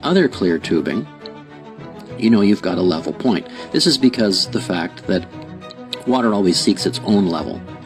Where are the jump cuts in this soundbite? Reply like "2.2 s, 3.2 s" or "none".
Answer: none